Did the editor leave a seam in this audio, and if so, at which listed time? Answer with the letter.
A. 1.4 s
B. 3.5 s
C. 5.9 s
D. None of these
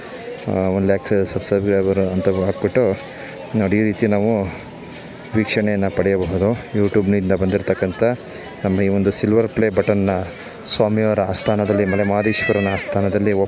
D